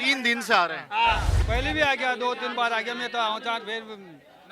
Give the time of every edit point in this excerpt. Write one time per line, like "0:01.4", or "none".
0:01.3